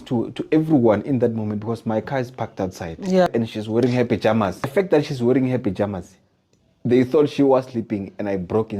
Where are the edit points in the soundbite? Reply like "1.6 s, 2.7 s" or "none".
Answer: 3.3 s, 4.7 s

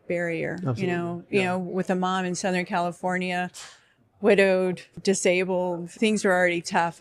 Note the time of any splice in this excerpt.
4.9 s, 5.9 s

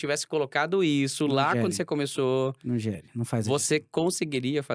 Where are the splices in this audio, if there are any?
none

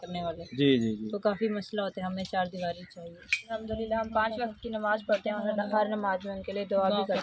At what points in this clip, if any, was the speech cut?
3.5 s

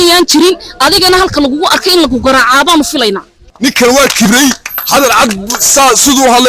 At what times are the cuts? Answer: 3.4 s

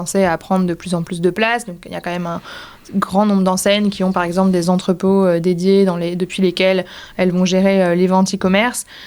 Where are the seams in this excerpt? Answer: none

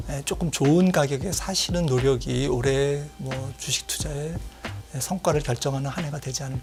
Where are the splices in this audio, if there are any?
none

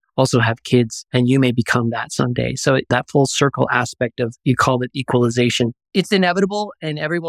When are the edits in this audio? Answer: 5.8 s

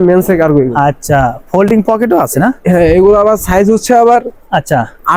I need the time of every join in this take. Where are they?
none

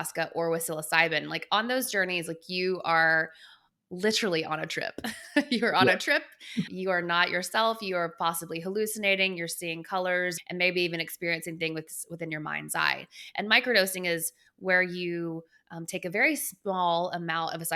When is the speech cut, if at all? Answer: none

